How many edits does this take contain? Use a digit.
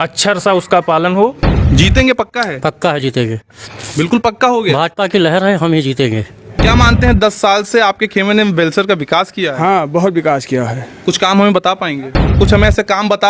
3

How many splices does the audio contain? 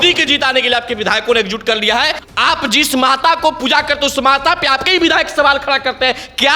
1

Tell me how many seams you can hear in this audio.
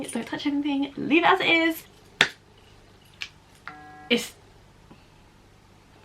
1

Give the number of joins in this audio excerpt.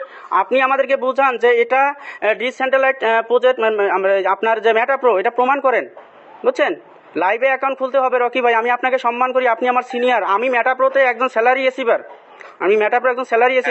0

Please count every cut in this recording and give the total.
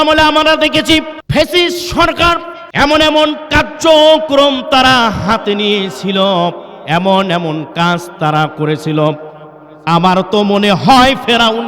2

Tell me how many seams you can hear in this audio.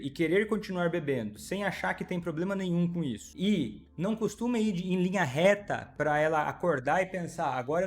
1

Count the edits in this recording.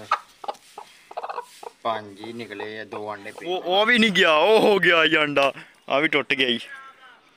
1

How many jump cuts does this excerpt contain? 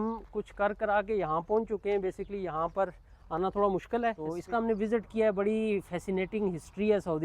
1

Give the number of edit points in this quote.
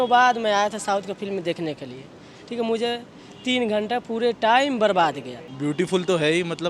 1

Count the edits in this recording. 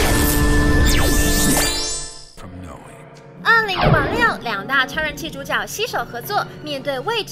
1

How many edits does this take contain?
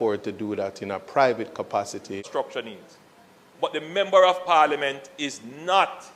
1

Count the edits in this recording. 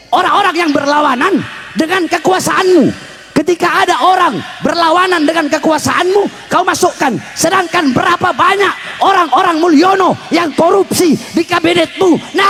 0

